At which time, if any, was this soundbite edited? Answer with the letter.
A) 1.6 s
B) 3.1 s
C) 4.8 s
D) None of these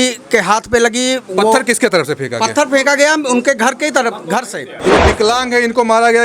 C